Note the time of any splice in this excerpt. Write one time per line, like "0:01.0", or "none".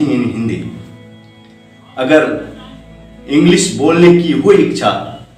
none

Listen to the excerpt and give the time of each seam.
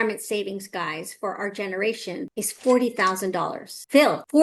none

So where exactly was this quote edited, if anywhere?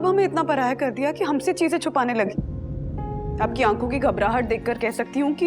0:03.3

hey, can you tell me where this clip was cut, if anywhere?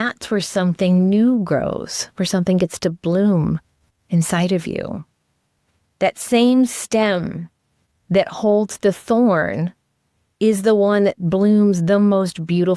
none

